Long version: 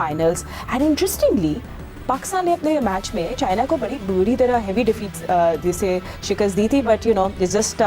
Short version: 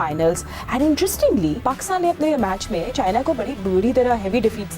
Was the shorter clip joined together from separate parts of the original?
yes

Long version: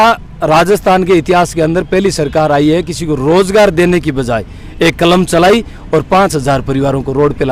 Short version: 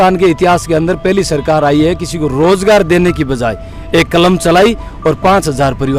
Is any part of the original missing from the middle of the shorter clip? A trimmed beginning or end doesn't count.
no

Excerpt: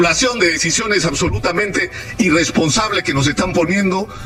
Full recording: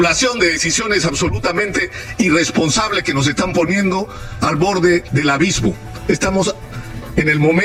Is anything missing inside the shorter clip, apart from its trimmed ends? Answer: no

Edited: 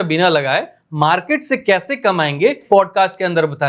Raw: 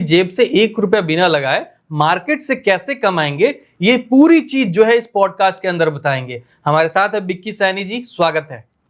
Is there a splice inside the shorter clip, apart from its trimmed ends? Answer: yes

